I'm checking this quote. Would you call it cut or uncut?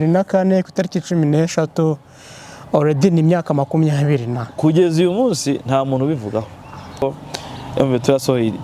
cut